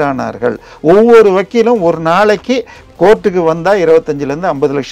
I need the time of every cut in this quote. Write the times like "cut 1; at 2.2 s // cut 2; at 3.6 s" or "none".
none